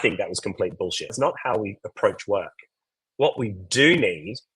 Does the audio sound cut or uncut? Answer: cut